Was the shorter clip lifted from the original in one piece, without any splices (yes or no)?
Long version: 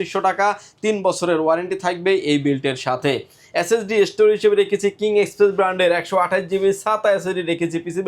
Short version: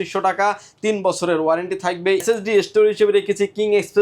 no